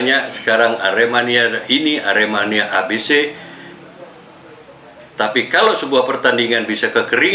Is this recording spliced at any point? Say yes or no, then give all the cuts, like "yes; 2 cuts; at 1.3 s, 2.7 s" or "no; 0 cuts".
no; 0 cuts